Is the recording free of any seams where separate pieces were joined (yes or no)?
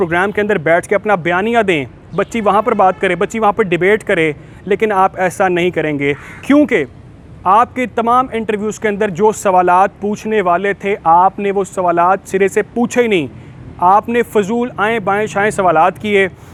yes